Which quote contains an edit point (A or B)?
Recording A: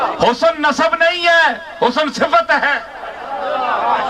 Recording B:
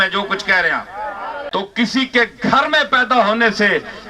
B